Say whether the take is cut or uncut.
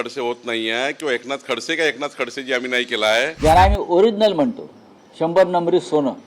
cut